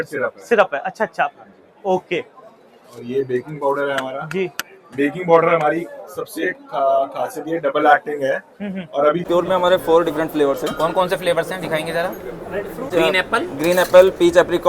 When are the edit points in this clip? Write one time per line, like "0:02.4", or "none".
0:09.2
0:12.9